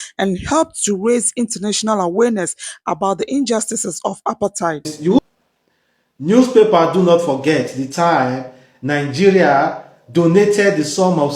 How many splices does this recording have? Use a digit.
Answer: 1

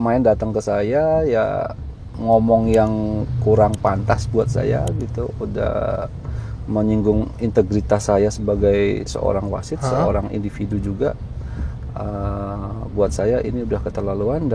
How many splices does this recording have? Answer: 0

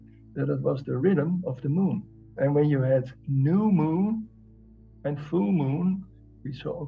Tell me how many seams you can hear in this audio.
2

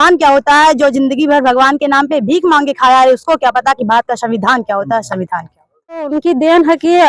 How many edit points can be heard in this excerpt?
1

